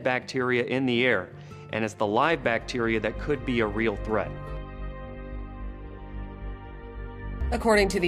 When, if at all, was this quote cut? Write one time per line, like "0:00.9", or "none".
0:04.4